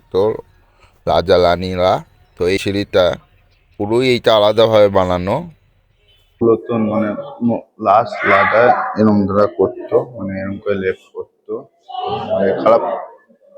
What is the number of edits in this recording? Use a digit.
2